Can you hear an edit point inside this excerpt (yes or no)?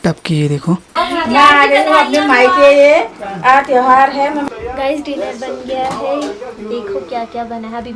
yes